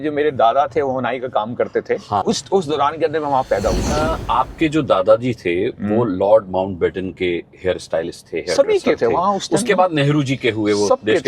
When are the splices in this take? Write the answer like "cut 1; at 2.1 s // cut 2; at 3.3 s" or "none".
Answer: cut 1; at 2.2 s // cut 2; at 4.1 s